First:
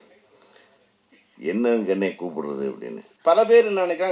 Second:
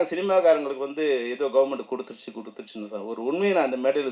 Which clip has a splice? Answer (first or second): first